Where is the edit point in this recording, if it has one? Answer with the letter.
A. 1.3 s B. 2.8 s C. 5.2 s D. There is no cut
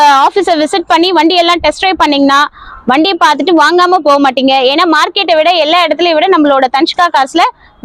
D